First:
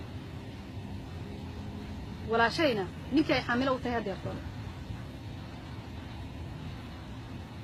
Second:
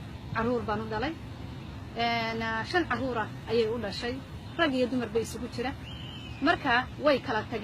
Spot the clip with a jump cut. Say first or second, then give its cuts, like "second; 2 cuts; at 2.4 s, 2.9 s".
second; 1 cut; at 5.3 s